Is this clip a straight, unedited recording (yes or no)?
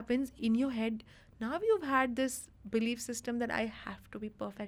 yes